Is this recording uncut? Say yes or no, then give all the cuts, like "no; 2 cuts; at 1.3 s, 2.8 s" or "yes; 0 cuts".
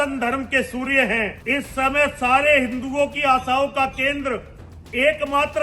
no; 1 cut; at 1.4 s